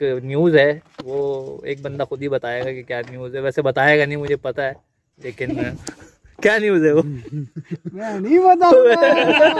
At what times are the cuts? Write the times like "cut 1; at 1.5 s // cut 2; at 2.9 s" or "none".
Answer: none